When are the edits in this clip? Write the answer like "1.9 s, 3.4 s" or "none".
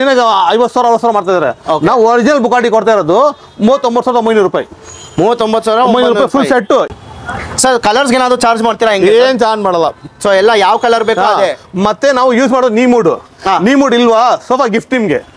6.9 s